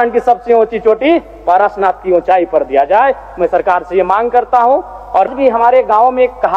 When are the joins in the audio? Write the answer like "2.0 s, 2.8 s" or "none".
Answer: 5.3 s